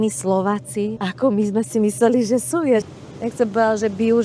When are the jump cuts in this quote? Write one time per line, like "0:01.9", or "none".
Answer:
0:01.0
0:02.8